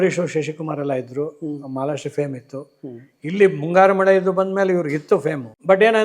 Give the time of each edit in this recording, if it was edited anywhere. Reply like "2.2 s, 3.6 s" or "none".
none